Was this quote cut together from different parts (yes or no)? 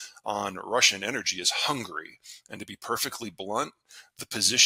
no